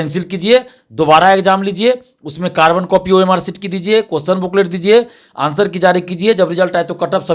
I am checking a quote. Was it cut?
no; 0 cuts

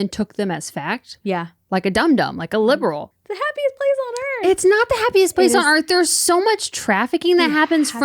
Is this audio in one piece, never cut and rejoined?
no; 1 cut; at 3.1 s

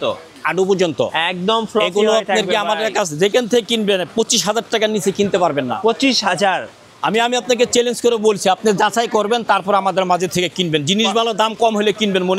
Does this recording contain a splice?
no; 0 cuts

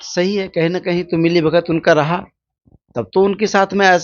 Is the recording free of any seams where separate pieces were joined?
yes; 0 cuts

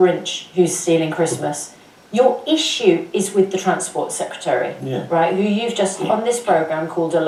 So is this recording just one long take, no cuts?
yes; 0 cuts

